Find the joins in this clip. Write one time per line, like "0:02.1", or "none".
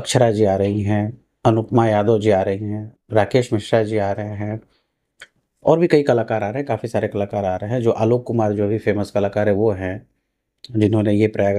none